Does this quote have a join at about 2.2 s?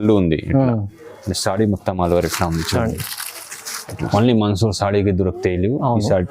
no; 1 cut; at 4.0 s

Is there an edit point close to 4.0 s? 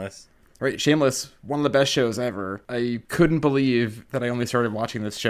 yes; 3 cuts; at 1.3 s, 3.0 s, 4.0 s

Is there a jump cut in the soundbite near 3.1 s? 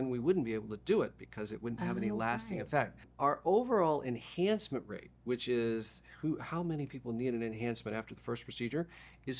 yes; 1 cut; at 3.1 s

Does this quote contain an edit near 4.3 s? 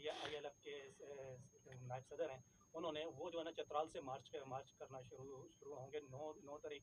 no; 0 cuts

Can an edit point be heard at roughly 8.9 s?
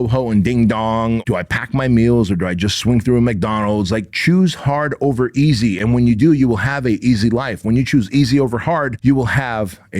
yes; 2 cuts; at 1.2 s, 8.9 s

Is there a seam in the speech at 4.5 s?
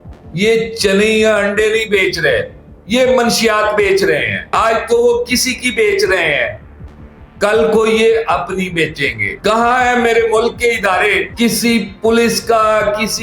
yes; 2 cuts; at 4.5 s, 11.2 s

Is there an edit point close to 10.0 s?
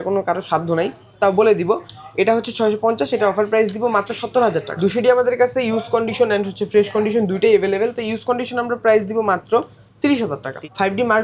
yes; 2 cuts; at 4.7 s, 10.0 s

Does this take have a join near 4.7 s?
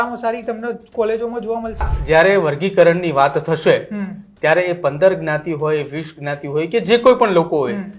no; 1 cut; at 1.9 s

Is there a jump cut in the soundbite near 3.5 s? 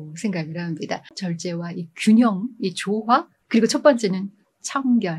no; 1 cut; at 1.2 s

